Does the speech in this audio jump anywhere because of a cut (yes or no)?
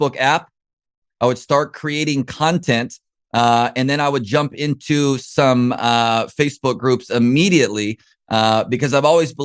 yes